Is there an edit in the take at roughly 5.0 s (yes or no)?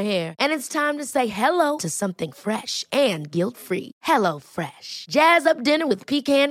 no